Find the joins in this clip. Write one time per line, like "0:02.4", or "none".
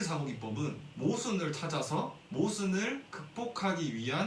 0:00.9
0:02.2